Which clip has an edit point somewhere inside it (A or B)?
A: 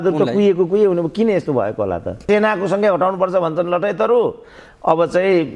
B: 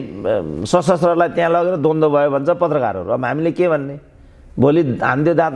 A